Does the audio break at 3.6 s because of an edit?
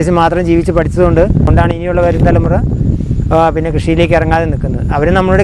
no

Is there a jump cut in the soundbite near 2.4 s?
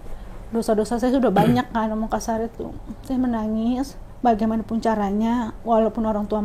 no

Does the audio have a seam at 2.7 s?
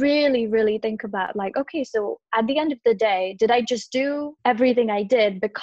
no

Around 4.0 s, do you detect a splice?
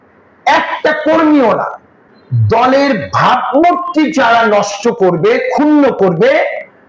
no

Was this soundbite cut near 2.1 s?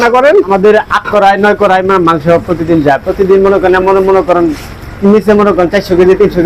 no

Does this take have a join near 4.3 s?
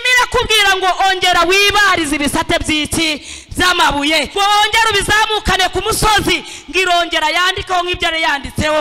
yes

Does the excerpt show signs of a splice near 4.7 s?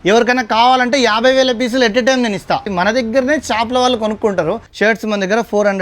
yes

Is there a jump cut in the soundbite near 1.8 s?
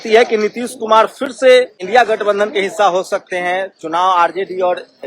yes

